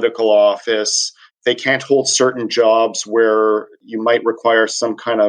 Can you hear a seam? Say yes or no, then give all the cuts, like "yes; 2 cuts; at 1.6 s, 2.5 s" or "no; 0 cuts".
yes; 2 cuts; at 1.3 s, 3.8 s